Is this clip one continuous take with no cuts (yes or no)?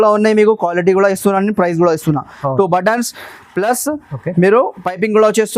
yes